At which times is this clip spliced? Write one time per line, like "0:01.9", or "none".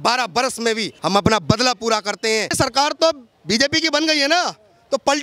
0:00.9
0:02.5